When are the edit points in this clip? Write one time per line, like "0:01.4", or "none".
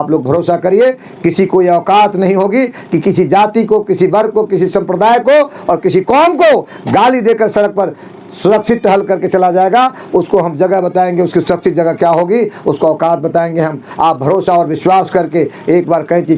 0:13.9